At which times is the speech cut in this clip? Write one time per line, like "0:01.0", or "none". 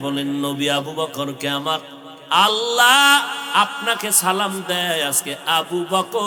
none